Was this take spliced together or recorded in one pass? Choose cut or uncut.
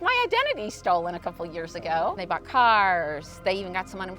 cut